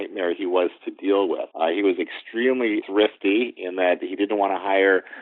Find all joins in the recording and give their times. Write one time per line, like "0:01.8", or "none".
0:01.5
0:02.8